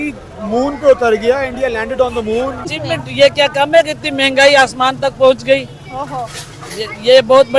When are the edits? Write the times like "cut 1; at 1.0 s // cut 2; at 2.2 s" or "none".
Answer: cut 1; at 2.7 s